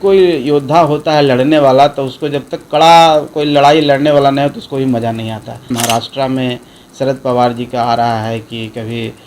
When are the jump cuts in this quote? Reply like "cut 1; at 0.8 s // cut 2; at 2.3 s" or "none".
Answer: cut 1; at 5.7 s

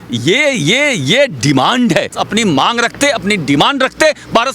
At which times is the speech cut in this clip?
cut 1; at 2.1 s

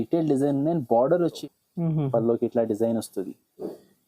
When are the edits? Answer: cut 1; at 1.4 s

